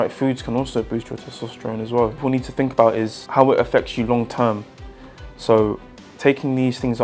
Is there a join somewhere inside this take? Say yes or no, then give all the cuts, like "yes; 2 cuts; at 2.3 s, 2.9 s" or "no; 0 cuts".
yes; 2 cuts; at 2.2 s, 3.2 s